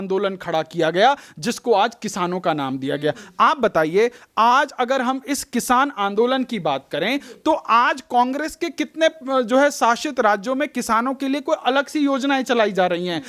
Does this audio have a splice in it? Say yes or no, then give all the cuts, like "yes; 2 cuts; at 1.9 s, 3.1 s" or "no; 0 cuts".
no; 0 cuts